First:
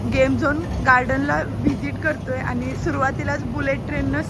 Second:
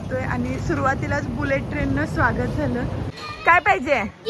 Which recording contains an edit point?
second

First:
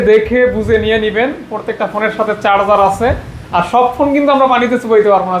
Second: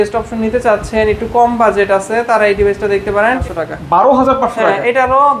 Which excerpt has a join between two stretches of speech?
second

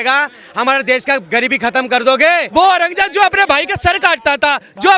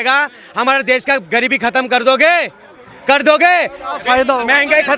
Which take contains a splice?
first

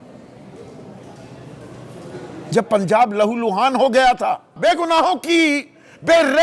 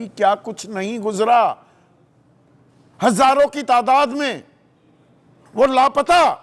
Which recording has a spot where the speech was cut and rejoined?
first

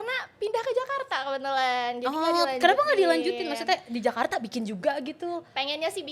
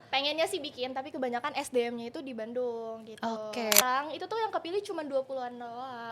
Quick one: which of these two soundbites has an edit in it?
second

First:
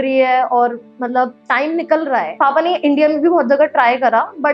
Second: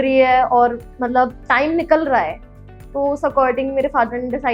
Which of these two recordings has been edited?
first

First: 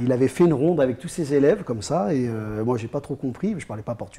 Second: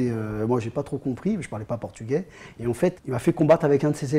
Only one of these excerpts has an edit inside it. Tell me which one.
second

